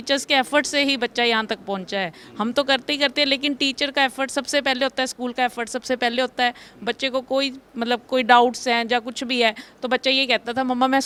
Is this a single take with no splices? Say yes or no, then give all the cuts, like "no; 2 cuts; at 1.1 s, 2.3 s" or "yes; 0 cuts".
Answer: yes; 0 cuts